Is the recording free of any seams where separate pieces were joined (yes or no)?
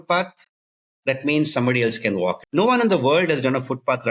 no